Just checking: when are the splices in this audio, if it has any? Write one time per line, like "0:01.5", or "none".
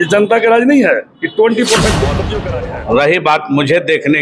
0:02.2